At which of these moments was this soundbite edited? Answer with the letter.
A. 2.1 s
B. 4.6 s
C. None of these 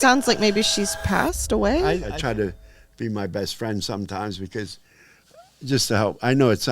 A